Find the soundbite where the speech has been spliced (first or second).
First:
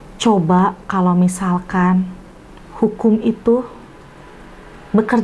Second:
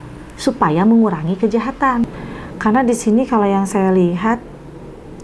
second